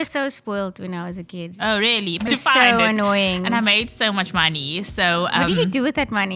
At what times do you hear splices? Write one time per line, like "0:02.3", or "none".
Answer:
0:02.3